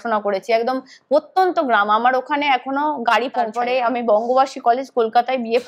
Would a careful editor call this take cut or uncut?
cut